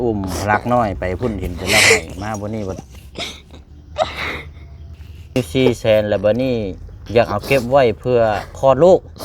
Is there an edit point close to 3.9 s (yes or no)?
no